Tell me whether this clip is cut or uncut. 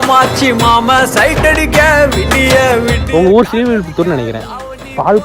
cut